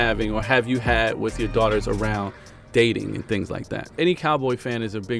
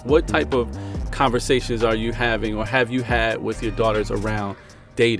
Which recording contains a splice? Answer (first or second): first